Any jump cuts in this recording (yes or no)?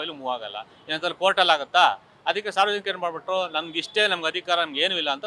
no